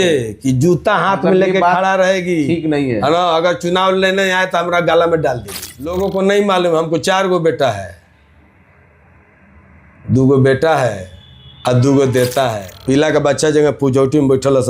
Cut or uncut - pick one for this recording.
cut